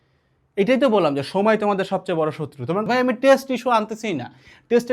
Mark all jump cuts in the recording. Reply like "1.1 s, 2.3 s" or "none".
2.8 s